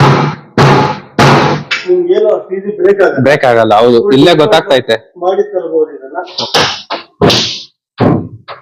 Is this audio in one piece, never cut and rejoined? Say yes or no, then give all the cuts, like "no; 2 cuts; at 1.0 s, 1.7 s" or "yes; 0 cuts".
no; 1 cut; at 6.3 s